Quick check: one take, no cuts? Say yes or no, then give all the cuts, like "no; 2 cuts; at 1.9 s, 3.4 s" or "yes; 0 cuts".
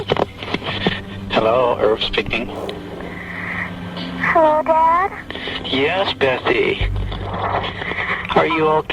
no; 1 cut; at 1.1 s